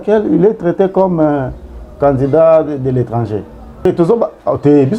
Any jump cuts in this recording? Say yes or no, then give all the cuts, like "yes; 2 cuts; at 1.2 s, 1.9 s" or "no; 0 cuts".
yes; 1 cut; at 3.8 s